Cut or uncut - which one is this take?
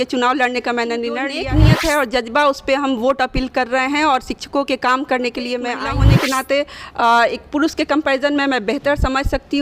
cut